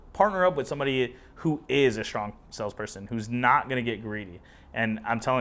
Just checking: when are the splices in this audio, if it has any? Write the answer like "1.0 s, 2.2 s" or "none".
none